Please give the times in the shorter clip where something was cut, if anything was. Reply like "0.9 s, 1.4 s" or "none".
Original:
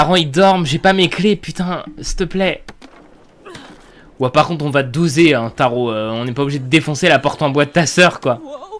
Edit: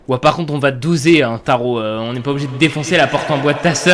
none